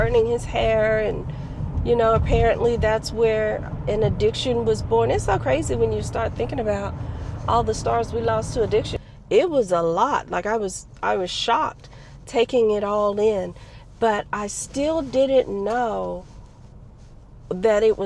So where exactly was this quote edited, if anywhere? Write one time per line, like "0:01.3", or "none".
0:09.0